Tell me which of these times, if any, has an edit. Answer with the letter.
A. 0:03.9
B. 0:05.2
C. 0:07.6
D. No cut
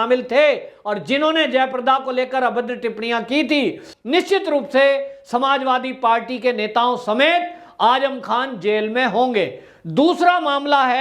A